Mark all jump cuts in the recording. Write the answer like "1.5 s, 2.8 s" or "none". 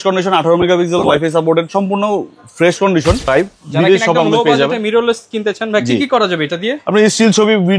3.2 s